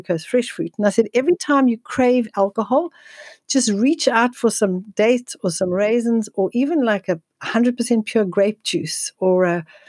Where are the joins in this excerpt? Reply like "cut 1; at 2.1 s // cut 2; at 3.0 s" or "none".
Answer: none

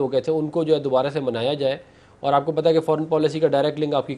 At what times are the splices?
none

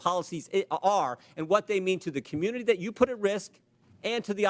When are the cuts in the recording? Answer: none

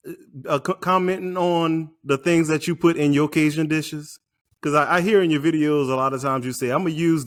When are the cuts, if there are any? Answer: none

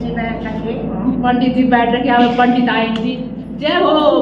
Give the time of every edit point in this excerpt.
none

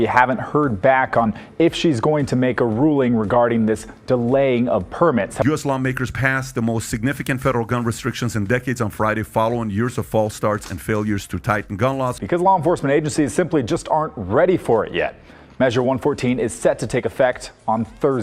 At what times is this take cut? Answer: cut 1; at 5.4 s // cut 2; at 12.2 s

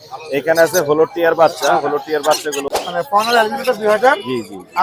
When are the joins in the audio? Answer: cut 1; at 2.7 s

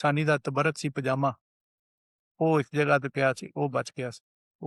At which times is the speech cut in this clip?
none

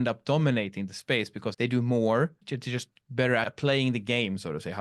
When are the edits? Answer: cut 1; at 1.5 s // cut 2; at 2.5 s // cut 3; at 3.5 s

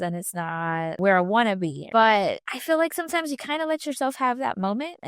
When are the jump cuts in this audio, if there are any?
cut 1; at 1.0 s // cut 2; at 1.8 s // cut 3; at 2.5 s

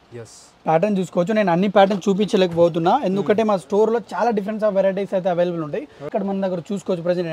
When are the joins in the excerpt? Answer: cut 1; at 6.1 s

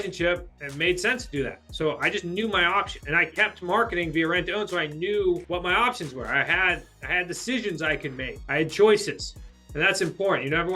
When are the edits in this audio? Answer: cut 1; at 3.0 s // cut 2; at 5.4 s // cut 3; at 8.3 s

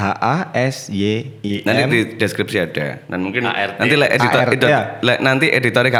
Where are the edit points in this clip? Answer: none

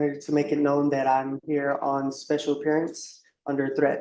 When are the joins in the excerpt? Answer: none

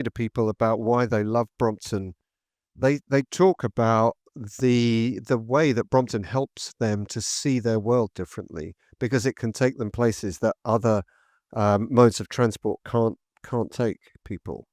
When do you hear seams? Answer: none

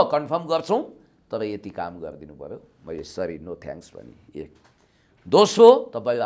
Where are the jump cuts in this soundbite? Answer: none

